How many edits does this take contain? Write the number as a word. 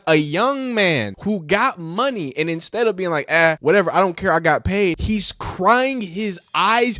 three